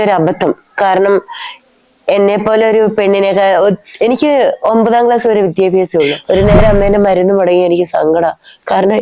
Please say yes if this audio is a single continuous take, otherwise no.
no